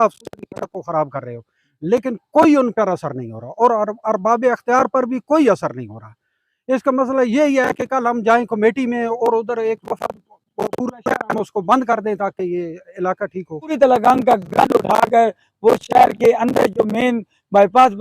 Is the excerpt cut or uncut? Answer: cut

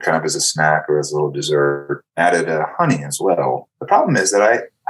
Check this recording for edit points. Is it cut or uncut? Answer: cut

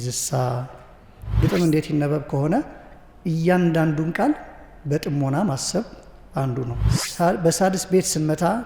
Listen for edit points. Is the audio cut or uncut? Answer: cut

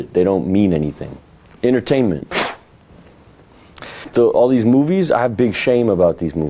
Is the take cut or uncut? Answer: uncut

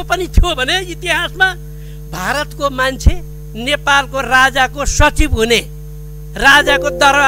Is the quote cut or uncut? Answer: uncut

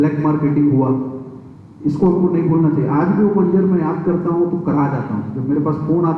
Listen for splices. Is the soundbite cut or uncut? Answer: uncut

